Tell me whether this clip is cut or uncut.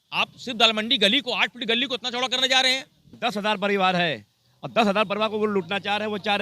cut